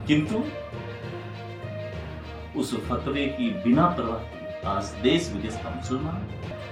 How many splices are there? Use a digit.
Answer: 0